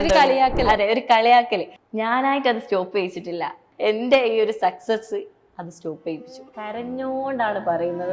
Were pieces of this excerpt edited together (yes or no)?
yes